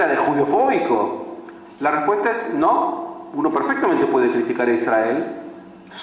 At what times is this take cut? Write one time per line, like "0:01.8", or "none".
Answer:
0:05.1